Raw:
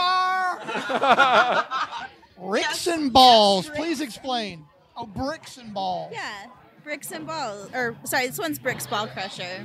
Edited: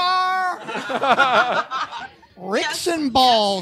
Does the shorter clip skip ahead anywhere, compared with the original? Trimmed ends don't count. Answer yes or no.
no